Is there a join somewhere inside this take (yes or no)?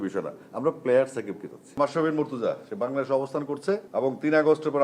yes